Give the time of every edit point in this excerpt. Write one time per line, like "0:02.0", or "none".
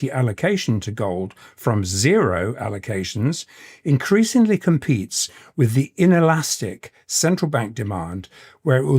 none